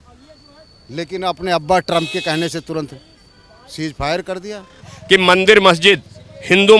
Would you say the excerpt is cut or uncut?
cut